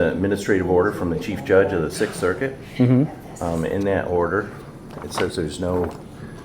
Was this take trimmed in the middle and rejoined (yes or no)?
no